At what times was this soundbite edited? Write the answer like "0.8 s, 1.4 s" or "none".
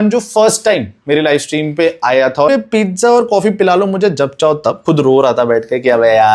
2.5 s, 4.8 s